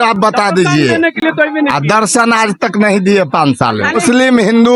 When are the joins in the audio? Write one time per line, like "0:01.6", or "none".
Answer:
none